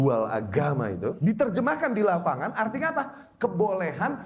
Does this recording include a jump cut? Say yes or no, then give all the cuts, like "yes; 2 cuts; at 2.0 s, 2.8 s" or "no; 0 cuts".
yes; 1 cut; at 1.2 s